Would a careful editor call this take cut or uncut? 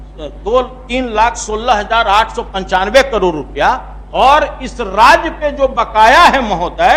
uncut